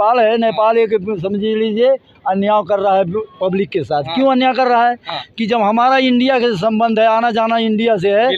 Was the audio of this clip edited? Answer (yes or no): no